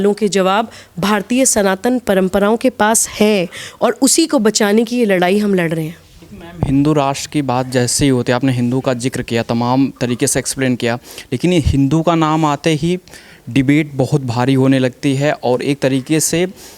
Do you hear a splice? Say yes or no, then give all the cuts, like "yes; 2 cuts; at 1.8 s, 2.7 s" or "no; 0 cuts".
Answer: no; 0 cuts